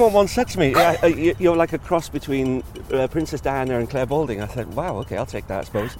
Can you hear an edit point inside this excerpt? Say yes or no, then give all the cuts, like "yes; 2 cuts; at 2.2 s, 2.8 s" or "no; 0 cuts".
no; 0 cuts